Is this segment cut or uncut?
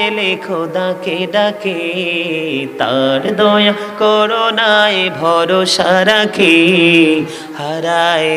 uncut